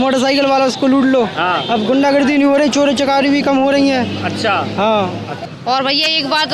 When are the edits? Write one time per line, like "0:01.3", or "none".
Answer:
0:05.4